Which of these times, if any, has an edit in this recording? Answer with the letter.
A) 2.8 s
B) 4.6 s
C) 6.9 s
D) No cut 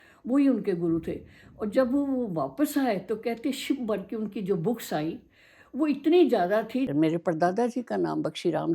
C